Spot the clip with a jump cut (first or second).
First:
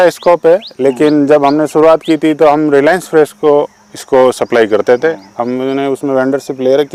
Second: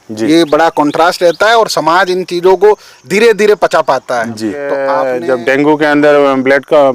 second